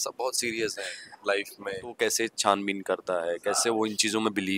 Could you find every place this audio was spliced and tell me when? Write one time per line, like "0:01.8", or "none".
0:01.9

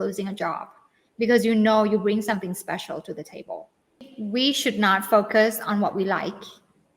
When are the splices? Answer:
0:04.0

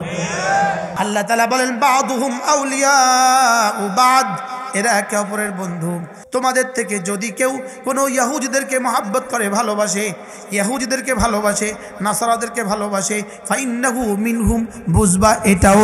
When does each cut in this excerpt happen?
0:00.9
0:06.2

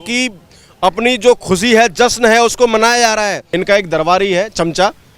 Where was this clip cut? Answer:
0:03.4

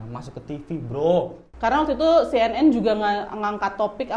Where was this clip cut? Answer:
0:01.4

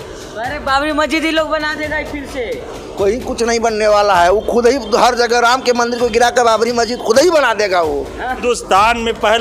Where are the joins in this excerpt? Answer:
0:08.4

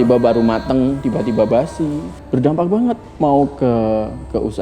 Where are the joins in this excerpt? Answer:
0:01.0
0:02.1

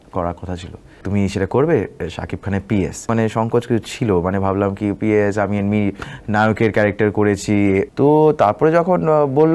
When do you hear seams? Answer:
0:01.0
0:03.1
0:07.9

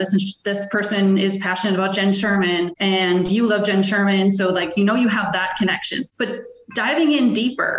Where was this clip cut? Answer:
0:02.7
0:06.0

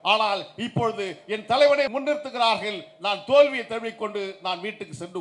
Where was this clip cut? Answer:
0:01.9

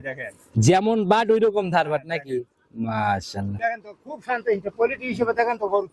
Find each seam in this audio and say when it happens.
0:03.5

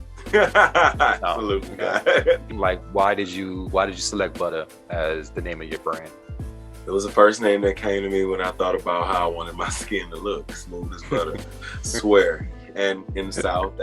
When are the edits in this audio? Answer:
0:02.5

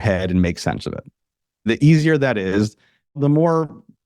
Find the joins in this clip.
0:01.7
0:03.1

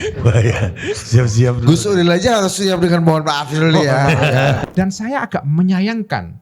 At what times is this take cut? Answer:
0:04.6

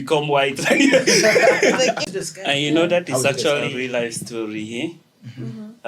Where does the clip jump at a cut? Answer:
0:02.1
0:03.7

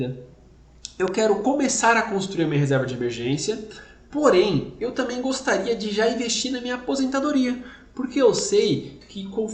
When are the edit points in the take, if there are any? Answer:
none

